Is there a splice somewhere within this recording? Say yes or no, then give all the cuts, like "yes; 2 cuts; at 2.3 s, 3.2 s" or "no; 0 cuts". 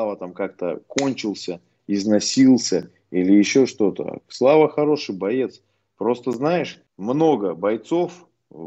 no; 0 cuts